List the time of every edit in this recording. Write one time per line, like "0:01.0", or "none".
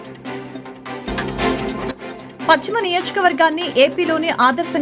0:01.0
0:02.4